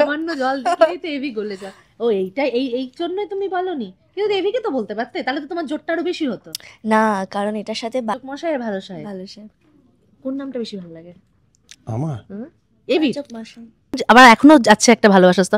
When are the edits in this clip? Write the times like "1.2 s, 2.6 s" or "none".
8.1 s, 14.0 s